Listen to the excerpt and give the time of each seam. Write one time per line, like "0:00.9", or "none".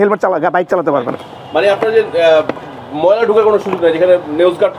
none